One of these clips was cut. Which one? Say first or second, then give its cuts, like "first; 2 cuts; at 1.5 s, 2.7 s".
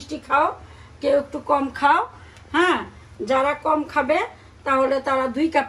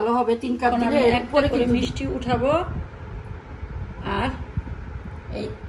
second; 1 cut; at 1.5 s